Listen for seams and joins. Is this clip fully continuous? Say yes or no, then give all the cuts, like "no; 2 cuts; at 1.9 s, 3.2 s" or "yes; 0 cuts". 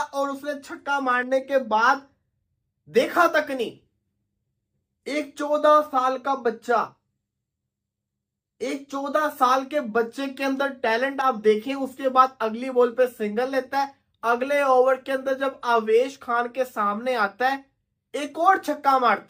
yes; 0 cuts